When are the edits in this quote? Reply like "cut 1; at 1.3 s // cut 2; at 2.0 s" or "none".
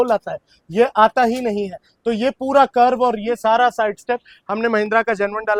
none